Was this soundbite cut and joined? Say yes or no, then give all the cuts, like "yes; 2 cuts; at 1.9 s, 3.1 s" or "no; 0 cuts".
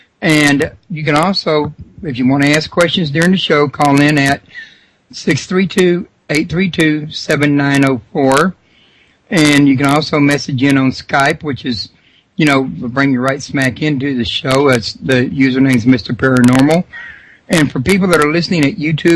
no; 0 cuts